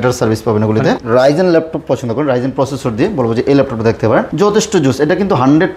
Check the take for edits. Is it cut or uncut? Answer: cut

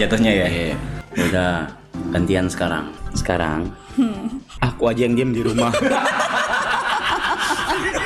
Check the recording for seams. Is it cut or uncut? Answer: cut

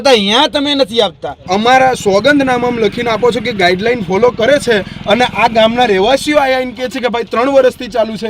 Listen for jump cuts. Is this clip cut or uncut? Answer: cut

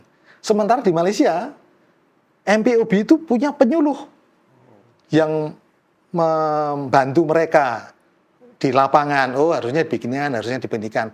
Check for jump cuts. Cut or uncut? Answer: uncut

